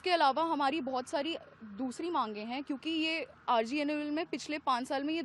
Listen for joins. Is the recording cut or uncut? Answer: uncut